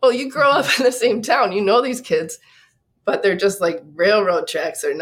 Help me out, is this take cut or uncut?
uncut